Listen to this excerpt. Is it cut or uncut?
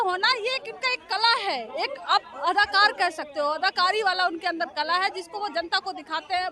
uncut